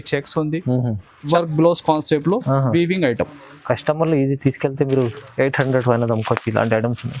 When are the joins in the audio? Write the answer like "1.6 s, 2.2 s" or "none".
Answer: 1.2 s